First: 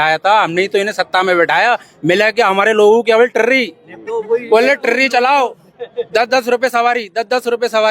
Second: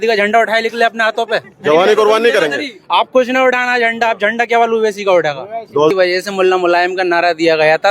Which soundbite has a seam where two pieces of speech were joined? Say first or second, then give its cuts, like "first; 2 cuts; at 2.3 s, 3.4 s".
second; 1 cut; at 5.9 s